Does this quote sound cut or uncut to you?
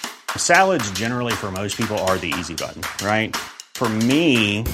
uncut